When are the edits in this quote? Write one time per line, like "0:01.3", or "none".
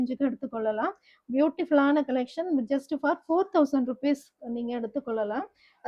none